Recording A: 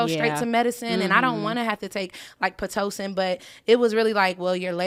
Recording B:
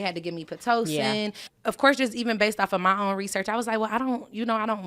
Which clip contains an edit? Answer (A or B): B